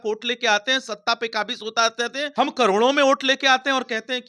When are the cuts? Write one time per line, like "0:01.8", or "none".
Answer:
0:02.3